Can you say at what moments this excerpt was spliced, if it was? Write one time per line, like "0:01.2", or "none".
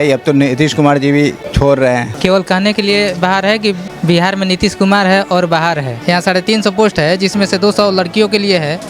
0:01.4
0:02.1
0:03.9
0:06.0